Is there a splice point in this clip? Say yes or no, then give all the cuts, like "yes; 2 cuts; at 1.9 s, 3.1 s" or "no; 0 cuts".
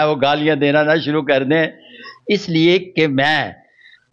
no; 0 cuts